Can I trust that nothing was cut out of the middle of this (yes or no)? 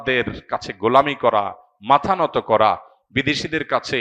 yes